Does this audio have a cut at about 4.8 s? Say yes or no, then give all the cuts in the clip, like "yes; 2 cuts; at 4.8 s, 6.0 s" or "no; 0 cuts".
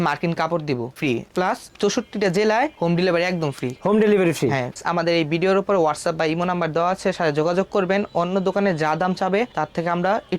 yes; 2 cuts; at 1.0 s, 4.8 s